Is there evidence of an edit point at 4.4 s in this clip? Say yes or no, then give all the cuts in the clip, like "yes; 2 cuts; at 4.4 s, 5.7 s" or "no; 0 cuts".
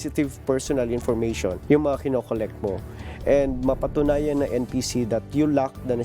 no; 1 cut; at 1.6 s